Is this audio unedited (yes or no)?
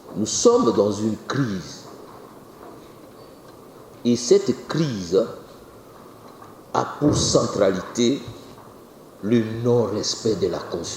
yes